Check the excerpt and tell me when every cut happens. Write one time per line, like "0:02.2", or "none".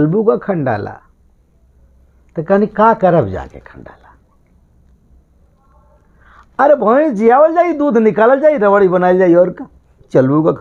none